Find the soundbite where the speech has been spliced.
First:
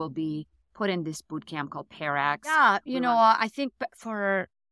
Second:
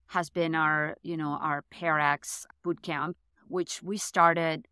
first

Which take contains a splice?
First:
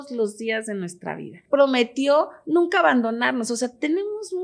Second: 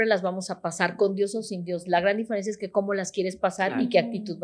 first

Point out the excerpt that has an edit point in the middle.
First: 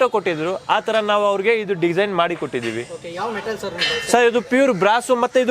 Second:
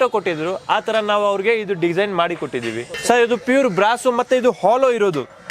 second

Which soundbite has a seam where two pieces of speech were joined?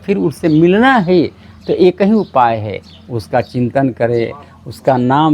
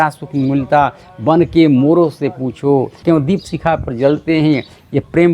second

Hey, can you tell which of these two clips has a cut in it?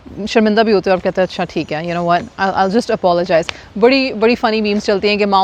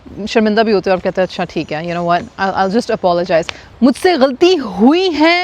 second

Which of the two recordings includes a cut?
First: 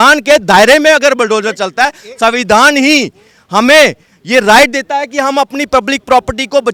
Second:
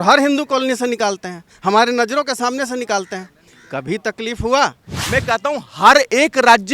second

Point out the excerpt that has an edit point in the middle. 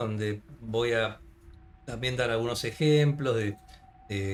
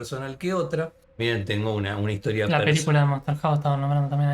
second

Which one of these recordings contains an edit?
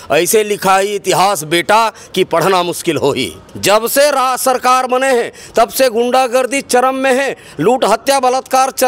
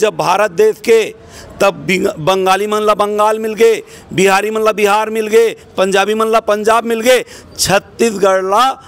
first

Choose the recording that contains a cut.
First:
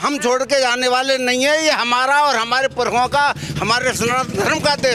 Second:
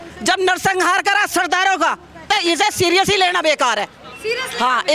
second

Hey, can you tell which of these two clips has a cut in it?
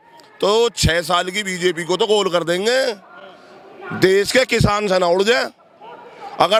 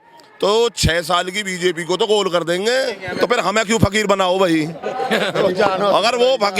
second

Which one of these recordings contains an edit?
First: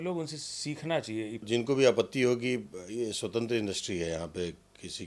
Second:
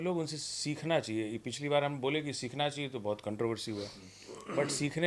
first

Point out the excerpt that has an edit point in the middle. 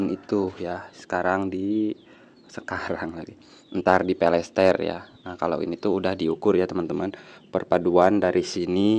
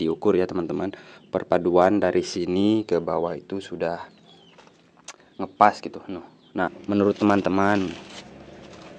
second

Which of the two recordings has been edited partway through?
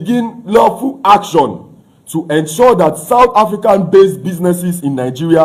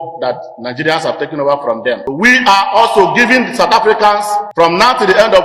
second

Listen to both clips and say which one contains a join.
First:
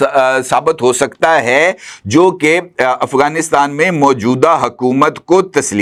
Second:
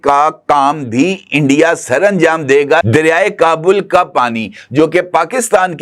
second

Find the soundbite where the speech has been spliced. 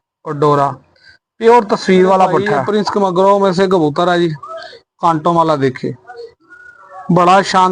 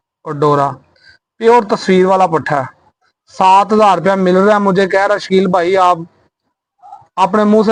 first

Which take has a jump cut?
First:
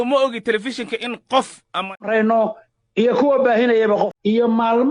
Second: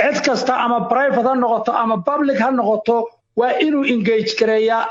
first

